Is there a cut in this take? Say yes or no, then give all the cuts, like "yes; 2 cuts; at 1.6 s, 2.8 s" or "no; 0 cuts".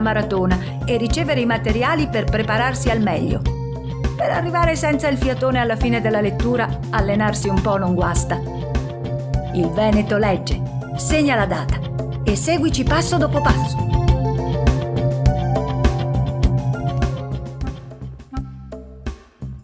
yes; 1 cut; at 17.4 s